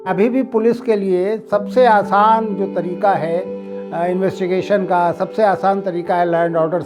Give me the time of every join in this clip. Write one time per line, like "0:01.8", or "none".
none